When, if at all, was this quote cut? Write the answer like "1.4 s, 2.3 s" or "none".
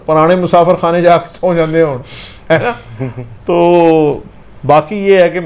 none